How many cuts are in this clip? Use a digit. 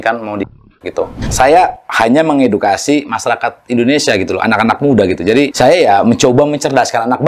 2